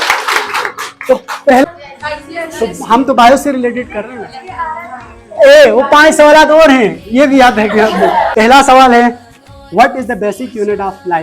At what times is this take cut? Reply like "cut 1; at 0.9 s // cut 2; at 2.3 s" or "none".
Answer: cut 1; at 1.6 s // cut 2; at 8.3 s